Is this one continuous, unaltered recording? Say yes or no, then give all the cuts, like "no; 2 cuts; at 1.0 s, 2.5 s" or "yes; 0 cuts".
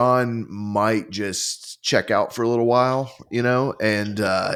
yes; 0 cuts